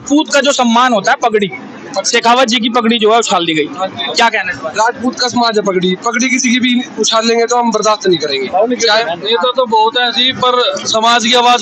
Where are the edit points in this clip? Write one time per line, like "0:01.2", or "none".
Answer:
0:09.0

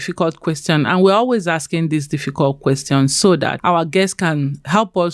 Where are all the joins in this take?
0:03.6

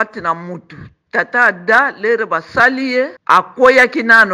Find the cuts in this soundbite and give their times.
0:03.2

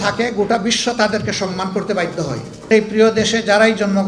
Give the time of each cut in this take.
0:02.7

